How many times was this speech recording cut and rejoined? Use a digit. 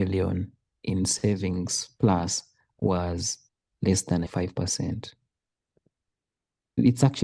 0